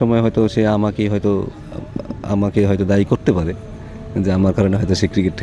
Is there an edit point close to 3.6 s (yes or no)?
no